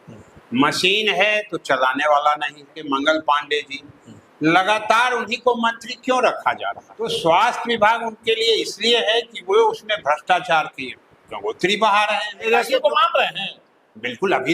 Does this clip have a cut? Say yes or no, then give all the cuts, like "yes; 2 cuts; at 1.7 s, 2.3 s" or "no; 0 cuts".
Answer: yes; 3 cuts; at 2.8 s, 7.1 s, 12.5 s